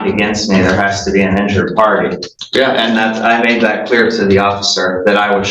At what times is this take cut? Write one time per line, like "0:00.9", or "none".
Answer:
0:02.3